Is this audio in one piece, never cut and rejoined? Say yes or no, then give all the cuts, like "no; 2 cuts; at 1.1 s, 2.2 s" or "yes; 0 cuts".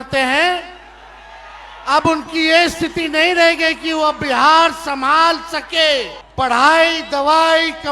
no; 1 cut; at 6.2 s